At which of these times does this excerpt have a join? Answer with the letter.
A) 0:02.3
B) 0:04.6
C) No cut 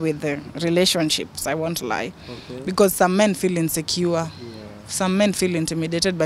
C